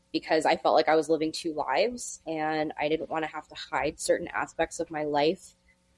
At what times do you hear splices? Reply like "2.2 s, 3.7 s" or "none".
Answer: none